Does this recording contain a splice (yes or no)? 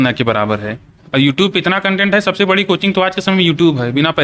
no